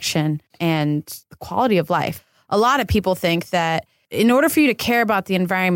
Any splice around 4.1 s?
yes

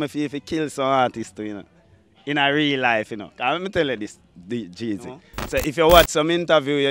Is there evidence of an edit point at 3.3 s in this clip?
no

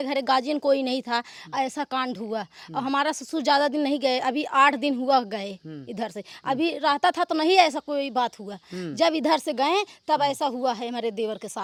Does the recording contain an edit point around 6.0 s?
no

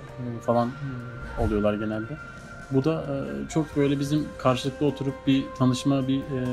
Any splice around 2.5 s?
no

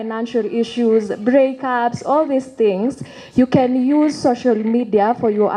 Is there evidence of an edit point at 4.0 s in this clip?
no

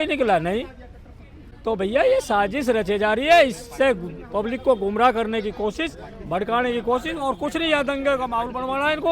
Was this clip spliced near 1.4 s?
no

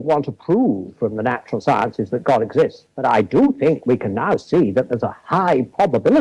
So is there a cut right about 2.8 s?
yes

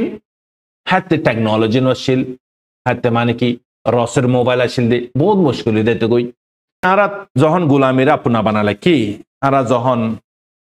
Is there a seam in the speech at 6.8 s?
yes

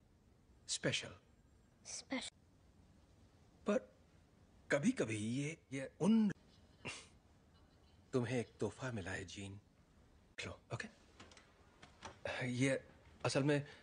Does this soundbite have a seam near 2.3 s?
no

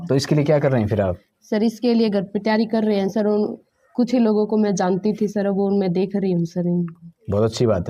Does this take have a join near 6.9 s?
no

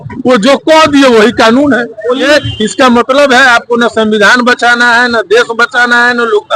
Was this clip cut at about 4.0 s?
no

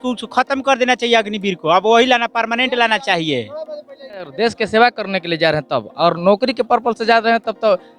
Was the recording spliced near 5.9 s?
no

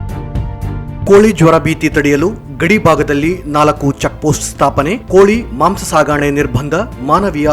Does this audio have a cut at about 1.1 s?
yes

